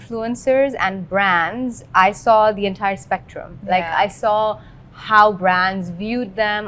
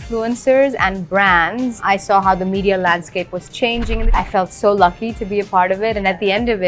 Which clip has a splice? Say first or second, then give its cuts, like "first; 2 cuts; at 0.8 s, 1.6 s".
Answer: second; 2 cuts; at 1.8 s, 4.0 s